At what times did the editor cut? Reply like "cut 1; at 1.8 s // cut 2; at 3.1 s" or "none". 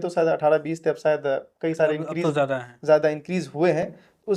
none